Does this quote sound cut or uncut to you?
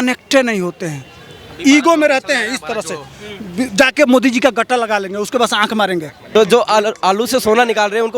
cut